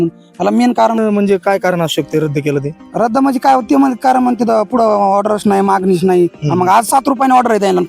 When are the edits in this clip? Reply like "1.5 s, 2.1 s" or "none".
1.0 s